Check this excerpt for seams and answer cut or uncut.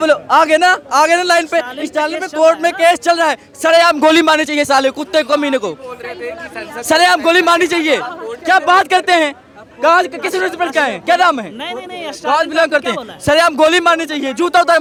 uncut